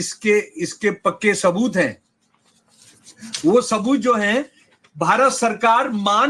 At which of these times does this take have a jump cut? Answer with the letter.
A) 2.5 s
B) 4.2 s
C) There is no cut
C